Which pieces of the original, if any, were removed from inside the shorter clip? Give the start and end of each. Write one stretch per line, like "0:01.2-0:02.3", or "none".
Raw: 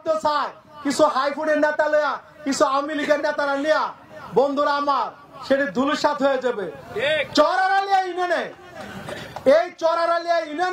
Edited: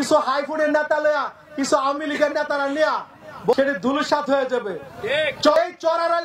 0:04.4-0:05.5
0:07.5-0:09.5